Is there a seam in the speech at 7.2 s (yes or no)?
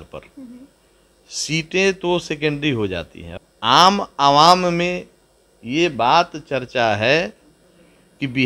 no